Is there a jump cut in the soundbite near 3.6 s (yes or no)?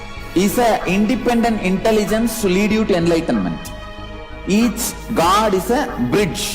no